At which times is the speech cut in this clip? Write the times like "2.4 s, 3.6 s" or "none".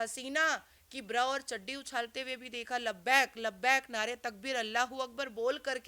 none